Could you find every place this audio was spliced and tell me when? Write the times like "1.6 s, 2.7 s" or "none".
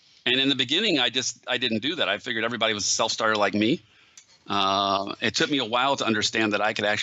4.6 s